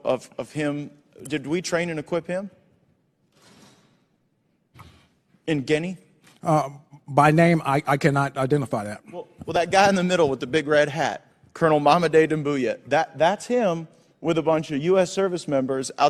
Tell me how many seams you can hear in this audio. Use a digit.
0